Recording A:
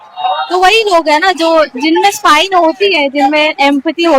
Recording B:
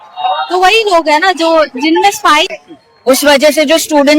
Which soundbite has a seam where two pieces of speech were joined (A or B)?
B